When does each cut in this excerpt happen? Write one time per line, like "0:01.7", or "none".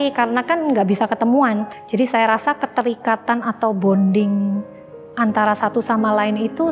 0:01.8